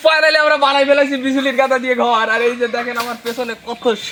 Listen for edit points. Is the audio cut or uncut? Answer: uncut